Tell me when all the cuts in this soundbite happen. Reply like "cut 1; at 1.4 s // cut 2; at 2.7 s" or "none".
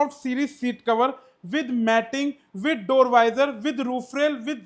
none